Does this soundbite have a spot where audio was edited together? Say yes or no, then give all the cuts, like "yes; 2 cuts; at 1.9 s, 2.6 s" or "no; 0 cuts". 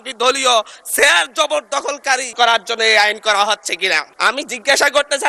yes; 2 cuts; at 2.3 s, 4.1 s